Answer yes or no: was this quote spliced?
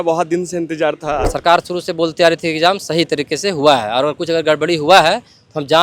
yes